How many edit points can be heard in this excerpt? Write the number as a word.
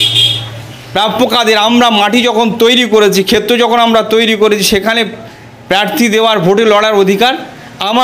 zero